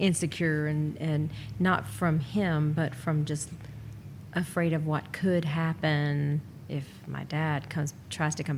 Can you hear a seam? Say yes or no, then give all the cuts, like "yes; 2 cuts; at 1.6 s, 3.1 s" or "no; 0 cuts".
no; 0 cuts